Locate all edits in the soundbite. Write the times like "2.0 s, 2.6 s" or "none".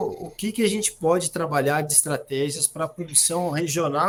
none